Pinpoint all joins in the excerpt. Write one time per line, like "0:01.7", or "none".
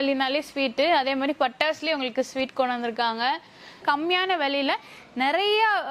0:03.8